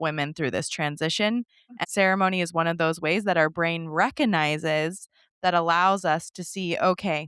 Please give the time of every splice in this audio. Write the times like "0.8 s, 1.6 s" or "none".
1.8 s

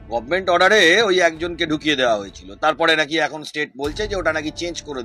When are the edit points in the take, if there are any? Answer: none

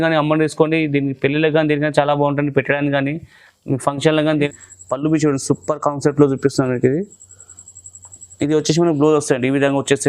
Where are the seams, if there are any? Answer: 4.5 s

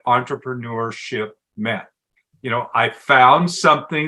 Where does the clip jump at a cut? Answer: none

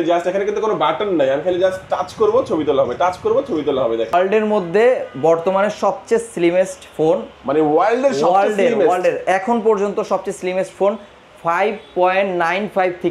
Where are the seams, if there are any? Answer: 4.1 s

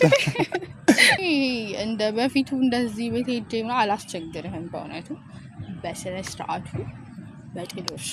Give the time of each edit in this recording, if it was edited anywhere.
1.2 s

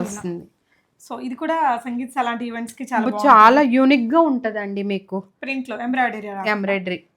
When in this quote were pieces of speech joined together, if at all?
none

